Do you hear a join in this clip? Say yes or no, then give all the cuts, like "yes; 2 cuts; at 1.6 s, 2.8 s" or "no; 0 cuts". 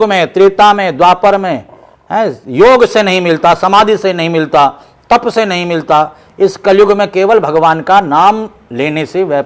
no; 0 cuts